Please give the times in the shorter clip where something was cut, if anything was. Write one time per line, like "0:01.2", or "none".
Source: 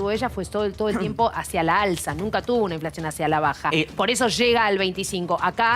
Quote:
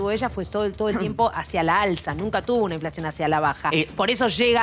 none